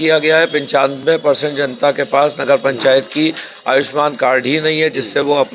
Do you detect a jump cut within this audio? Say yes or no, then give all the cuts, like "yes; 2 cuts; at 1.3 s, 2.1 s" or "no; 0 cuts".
no; 0 cuts